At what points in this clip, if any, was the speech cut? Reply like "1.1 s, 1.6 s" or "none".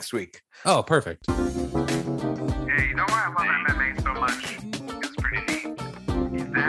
1.1 s